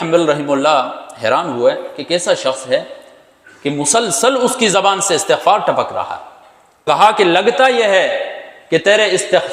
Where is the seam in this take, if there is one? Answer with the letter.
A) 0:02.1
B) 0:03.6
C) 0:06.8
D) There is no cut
C